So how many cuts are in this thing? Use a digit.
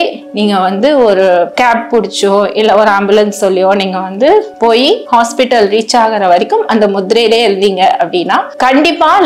1